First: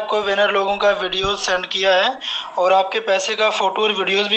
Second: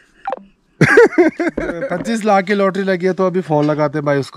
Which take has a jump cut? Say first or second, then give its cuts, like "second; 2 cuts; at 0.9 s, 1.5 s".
second; 1 cut; at 1.8 s